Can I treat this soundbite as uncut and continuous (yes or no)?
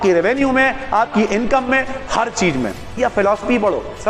no